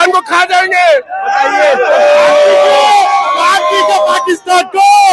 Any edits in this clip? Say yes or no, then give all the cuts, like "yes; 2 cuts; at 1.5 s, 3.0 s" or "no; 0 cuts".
no; 0 cuts